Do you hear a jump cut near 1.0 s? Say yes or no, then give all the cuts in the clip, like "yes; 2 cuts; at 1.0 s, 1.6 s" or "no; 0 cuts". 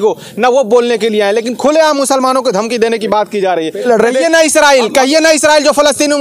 no; 1 cut; at 3.9 s